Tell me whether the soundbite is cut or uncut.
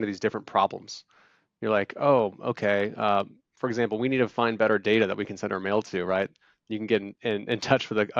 uncut